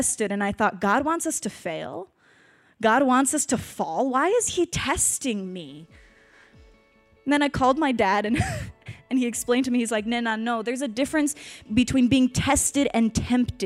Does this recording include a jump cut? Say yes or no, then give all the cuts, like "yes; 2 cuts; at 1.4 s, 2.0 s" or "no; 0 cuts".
yes; 1 cut; at 11.7 s